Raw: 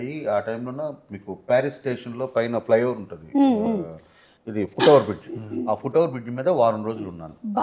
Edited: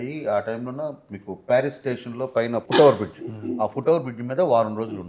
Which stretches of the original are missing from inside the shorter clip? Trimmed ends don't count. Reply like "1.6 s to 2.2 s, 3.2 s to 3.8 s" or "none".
2.6 s to 4.7 s